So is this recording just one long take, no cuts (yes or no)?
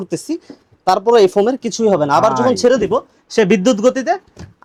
yes